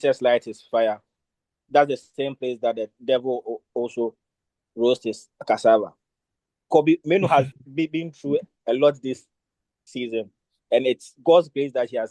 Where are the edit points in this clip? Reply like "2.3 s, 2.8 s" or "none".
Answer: none